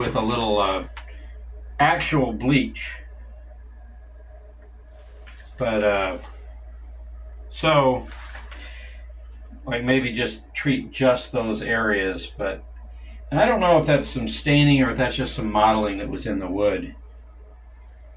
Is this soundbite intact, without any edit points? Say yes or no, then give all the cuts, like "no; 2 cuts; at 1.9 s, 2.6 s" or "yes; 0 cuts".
yes; 0 cuts